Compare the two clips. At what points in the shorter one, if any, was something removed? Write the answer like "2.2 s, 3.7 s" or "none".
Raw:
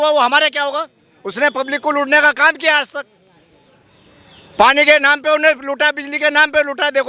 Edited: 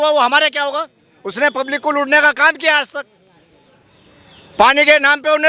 none